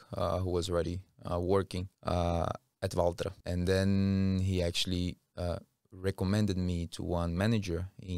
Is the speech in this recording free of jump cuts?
no; 2 cuts; at 1.9 s, 3.4 s

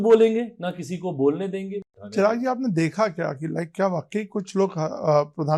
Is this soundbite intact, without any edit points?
no; 1 cut; at 1.9 s

